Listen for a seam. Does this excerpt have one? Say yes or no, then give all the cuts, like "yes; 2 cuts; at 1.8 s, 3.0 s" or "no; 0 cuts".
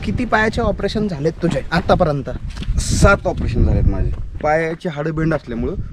yes; 1 cut; at 4.2 s